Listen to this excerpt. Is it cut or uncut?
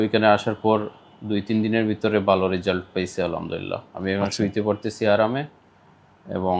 uncut